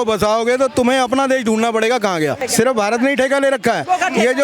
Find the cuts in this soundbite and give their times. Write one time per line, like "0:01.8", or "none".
0:02.4